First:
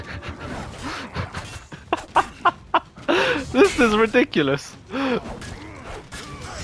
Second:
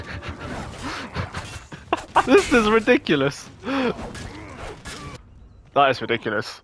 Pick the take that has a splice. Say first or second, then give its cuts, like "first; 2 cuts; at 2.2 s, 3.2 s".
second; 2 cuts; at 2.3 s, 5.2 s